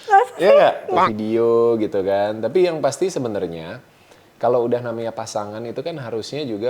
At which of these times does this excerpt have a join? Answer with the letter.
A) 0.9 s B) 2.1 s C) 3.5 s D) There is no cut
A